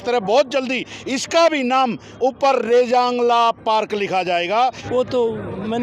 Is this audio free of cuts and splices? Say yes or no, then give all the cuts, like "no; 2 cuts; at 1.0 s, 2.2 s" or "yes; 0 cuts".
no; 1 cut; at 4.7 s